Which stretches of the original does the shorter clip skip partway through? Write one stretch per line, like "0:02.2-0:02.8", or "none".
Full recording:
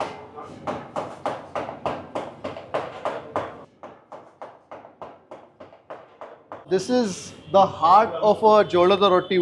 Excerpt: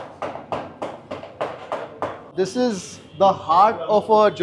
0:03.6-0:06.6